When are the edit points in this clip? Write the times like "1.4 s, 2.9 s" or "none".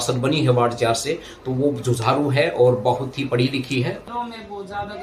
4.0 s